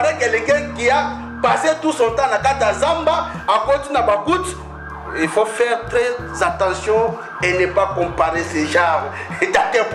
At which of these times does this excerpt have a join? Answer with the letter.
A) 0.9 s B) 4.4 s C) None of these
C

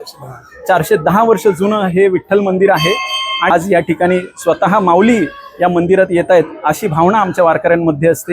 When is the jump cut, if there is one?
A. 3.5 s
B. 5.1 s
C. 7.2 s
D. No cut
A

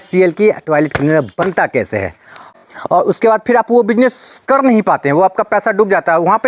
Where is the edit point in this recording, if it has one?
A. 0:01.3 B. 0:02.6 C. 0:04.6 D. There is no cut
B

